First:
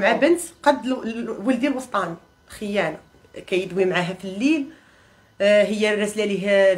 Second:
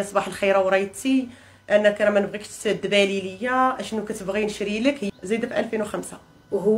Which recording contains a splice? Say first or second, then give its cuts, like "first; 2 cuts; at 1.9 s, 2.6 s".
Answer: second; 1 cut; at 5.1 s